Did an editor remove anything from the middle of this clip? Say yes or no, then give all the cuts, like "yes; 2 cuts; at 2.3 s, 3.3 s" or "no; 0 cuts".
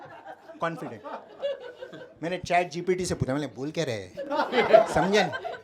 no; 0 cuts